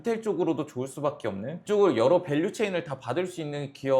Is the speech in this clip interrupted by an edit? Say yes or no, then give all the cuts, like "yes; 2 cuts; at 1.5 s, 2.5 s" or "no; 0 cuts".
yes; 1 cut; at 1.6 s